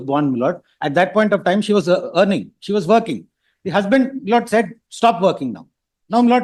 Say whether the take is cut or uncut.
uncut